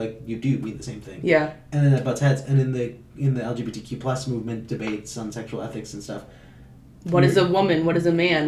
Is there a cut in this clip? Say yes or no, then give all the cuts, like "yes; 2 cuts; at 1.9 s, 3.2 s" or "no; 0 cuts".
no; 0 cuts